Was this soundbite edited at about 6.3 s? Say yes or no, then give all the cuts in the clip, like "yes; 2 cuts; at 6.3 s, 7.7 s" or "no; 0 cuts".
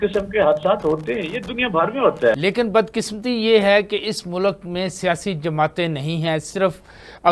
no; 1 cut; at 2.4 s